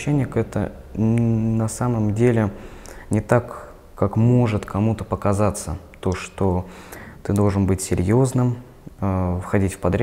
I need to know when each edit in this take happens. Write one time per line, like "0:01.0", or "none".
none